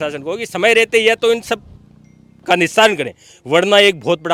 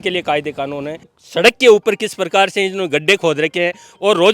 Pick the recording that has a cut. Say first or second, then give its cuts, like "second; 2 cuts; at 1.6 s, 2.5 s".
second; 1 cut; at 1.2 s